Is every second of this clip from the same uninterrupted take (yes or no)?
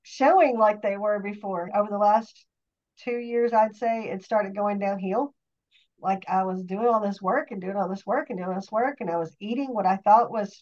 yes